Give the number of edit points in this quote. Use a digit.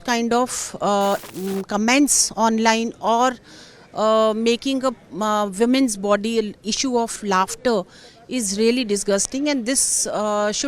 1